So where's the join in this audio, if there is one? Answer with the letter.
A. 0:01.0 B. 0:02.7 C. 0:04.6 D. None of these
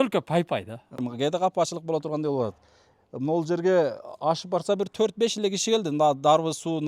A